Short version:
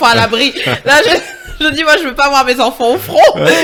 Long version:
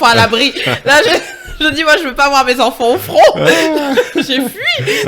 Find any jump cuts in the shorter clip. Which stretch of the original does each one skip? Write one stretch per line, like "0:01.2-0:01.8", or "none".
none